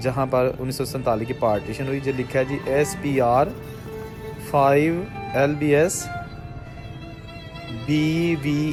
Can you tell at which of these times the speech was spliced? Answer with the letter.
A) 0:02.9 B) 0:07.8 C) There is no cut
C